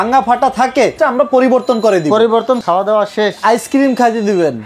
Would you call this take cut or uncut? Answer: cut